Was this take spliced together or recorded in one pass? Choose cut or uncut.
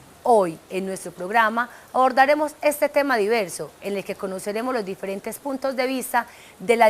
cut